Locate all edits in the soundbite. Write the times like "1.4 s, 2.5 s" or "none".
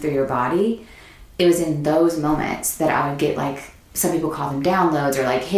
3.7 s